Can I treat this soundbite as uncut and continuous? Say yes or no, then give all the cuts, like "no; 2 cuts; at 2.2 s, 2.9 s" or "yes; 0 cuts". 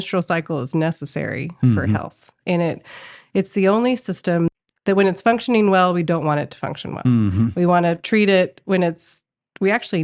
no; 1 cut; at 4.5 s